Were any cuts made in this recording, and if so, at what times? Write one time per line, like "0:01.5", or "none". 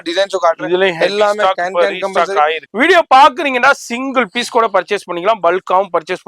0:02.6